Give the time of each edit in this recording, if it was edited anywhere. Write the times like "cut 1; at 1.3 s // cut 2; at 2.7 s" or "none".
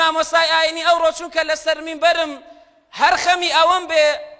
none